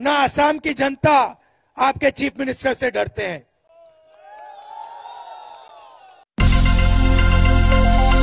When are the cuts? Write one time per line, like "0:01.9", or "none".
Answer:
none